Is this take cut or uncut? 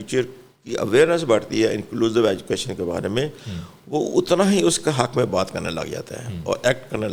uncut